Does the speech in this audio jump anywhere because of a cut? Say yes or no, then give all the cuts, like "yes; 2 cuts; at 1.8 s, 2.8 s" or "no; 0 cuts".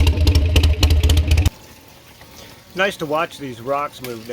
yes; 1 cut; at 1.5 s